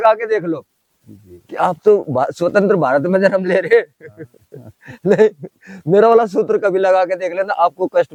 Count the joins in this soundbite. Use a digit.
0